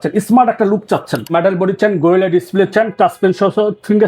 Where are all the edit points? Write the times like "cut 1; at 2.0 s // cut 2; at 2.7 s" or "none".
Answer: cut 1; at 1.3 s